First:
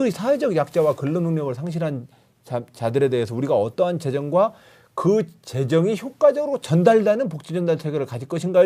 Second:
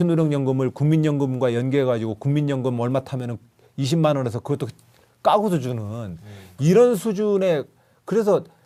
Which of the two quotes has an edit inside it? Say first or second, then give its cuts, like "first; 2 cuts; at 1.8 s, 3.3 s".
first; 1 cut; at 6.6 s